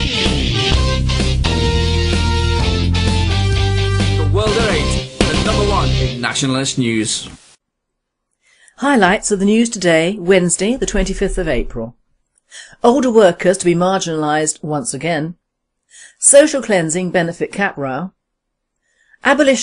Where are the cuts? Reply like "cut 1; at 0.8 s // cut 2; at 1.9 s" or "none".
cut 1; at 17.3 s